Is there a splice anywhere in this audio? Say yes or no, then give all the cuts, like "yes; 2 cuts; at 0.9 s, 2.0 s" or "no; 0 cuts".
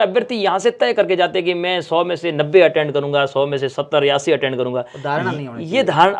no; 0 cuts